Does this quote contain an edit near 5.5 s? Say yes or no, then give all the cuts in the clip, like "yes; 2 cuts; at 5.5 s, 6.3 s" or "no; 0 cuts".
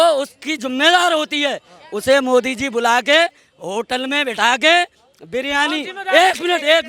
no; 0 cuts